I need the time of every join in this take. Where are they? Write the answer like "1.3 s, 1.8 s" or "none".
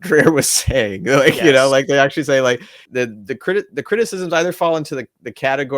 2.8 s